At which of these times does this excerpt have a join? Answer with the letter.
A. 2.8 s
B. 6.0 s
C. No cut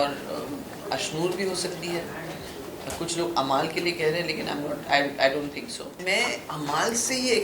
B